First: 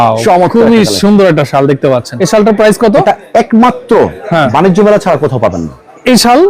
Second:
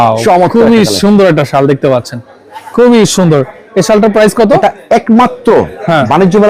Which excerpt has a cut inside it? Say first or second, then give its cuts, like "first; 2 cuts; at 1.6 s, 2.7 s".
first; 1 cut; at 2.1 s